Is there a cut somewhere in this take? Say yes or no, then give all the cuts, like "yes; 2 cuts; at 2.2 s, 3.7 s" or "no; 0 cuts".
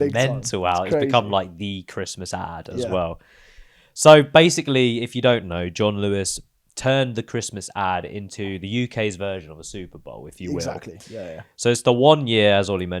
no; 0 cuts